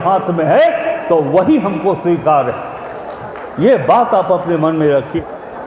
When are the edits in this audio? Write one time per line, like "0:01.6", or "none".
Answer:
none